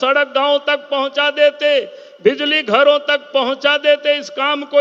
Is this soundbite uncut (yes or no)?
yes